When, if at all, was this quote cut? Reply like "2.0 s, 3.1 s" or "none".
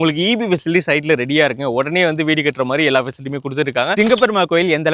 4.0 s